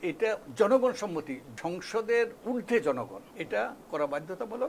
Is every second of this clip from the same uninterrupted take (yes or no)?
no